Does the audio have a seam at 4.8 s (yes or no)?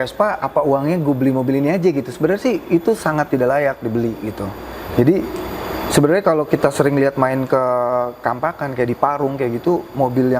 no